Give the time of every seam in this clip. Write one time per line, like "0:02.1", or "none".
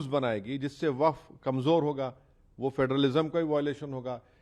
none